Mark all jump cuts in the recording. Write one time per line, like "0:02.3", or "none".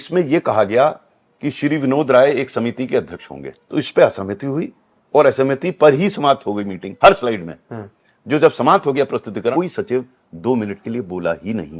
0:03.5
0:06.8
0:09.5